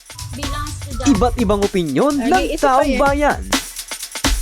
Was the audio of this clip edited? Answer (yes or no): yes